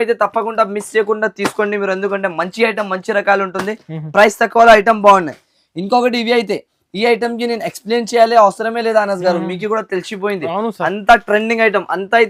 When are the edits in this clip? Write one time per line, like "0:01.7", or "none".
none